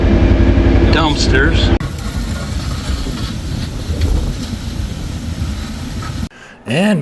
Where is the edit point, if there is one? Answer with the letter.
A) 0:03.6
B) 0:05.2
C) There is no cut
C